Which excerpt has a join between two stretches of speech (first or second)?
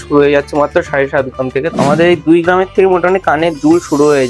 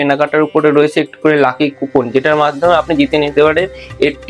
first